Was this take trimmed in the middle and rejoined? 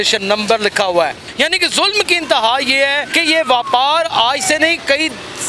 yes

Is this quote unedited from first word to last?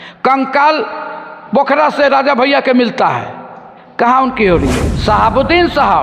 no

